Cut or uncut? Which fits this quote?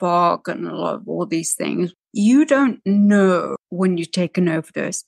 cut